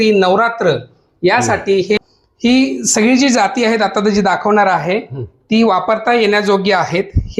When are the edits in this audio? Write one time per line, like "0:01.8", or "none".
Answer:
0:02.0